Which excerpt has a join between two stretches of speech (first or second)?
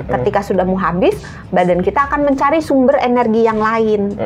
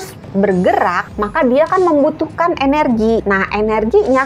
second